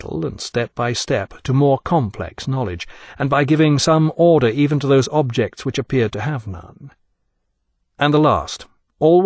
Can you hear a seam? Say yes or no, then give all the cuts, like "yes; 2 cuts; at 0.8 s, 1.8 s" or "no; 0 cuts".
yes; 1 cut; at 2.0 s